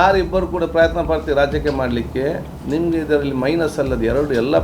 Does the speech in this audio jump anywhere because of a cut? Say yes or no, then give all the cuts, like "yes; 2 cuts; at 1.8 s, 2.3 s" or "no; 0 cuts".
no; 0 cuts